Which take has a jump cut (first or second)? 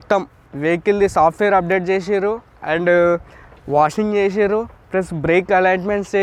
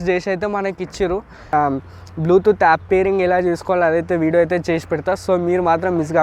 second